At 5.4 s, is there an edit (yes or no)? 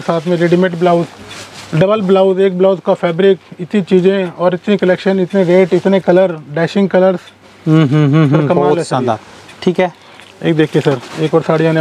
no